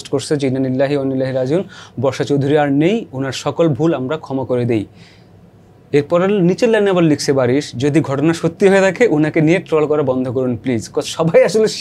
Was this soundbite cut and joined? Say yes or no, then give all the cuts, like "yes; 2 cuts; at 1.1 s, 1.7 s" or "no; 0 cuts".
no; 0 cuts